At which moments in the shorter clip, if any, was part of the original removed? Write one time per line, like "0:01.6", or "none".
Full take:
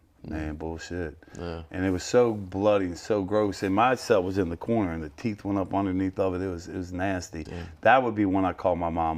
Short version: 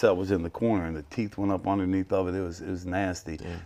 none